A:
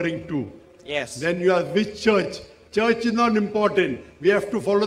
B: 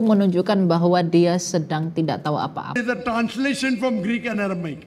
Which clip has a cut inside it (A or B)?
B